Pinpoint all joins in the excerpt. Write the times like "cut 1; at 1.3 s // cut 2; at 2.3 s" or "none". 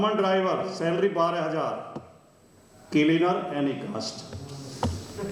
none